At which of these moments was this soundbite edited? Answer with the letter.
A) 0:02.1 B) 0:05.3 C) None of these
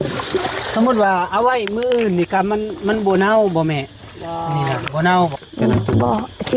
B